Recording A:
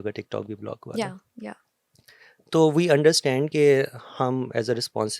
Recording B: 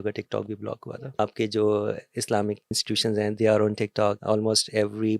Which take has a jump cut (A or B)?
B